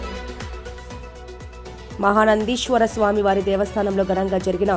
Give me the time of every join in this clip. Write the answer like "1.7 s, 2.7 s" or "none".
none